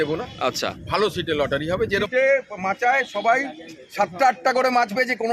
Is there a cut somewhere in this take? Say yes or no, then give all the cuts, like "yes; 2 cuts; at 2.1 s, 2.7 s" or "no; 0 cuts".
yes; 1 cut; at 2.1 s